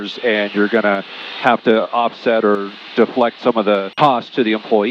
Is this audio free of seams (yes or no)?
no